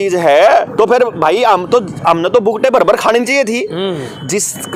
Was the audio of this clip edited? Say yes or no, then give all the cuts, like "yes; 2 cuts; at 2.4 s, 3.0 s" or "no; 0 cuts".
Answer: no; 0 cuts